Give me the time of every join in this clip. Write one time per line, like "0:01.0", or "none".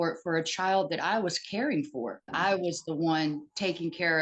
0:02.3